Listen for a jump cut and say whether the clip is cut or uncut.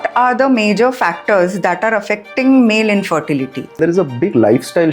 cut